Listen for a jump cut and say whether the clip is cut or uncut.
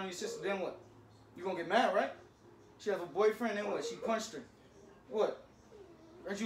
uncut